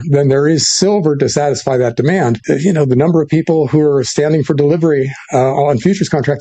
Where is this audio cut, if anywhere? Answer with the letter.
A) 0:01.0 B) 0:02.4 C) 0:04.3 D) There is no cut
B